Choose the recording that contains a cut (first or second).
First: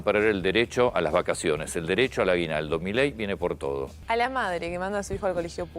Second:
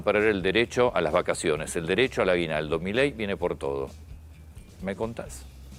first